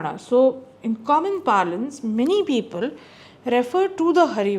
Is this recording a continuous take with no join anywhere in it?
yes; 0 cuts

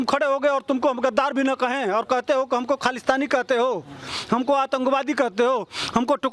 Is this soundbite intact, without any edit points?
yes; 0 cuts

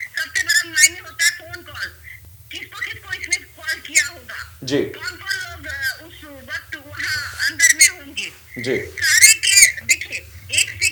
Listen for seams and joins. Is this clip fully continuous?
yes; 0 cuts

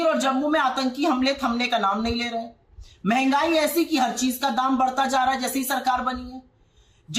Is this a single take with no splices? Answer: yes; 0 cuts

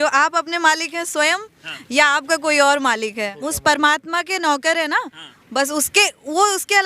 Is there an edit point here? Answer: yes; 1 cut; at 3.3 s

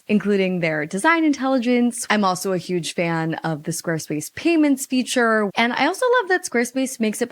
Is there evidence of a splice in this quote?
yes; 2 cuts; at 2.0 s, 5.5 s

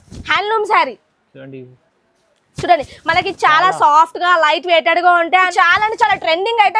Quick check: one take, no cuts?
no; 1 cut; at 5.5 s

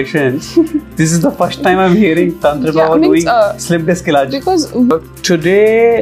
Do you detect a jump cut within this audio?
yes; 1 cut; at 4.9 s

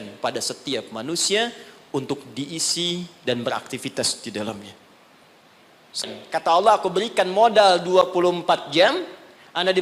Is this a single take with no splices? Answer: no; 1 cut; at 6.1 s

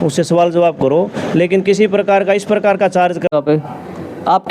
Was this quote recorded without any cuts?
no; 1 cut; at 3.3 s

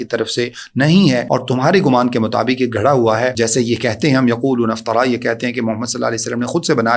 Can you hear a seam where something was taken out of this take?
yes; 2 cuts; at 1.2 s, 3.3 s

